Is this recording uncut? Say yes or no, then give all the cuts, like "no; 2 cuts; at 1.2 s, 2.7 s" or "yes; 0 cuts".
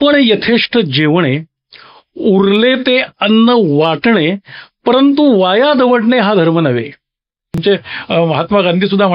no; 1 cut; at 7.6 s